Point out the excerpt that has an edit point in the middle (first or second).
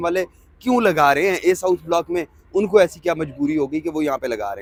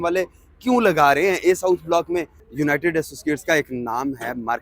second